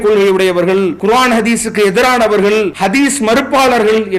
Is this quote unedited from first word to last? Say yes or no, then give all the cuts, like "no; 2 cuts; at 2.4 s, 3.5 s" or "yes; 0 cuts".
no; 2 cuts; at 1.0 s, 2.7 s